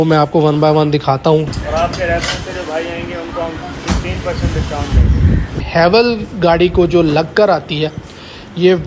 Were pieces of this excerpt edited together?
yes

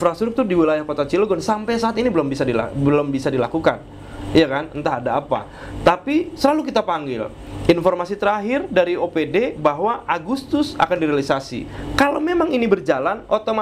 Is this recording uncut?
yes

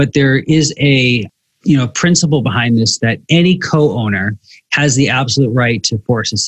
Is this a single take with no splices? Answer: yes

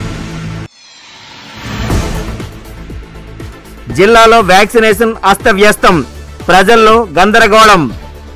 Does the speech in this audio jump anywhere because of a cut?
no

